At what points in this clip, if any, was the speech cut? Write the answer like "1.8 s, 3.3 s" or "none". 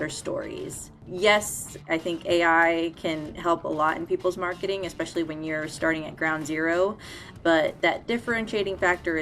1.0 s, 1.9 s